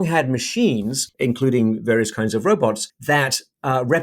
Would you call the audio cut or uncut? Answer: cut